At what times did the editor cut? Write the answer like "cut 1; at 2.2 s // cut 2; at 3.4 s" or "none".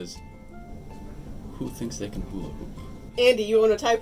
cut 1; at 3.0 s

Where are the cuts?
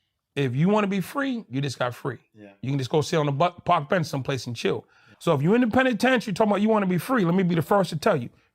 cut 1; at 5.1 s

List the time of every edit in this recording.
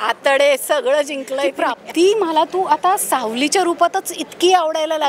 cut 1; at 1.7 s

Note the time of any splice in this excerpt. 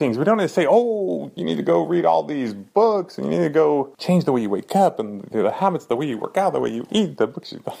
cut 1; at 1.3 s // cut 2; at 3.9 s

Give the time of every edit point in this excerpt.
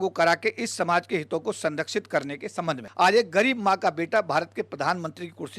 cut 1; at 2.9 s

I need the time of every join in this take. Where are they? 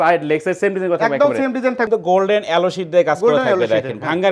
cut 1; at 1.9 s

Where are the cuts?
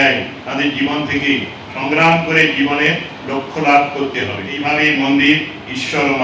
cut 1; at 4.5 s

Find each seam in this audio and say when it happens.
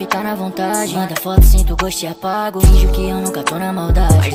none

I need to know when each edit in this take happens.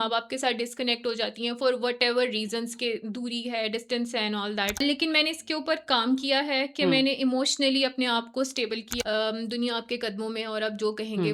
cut 1; at 4.8 s // cut 2; at 9.0 s

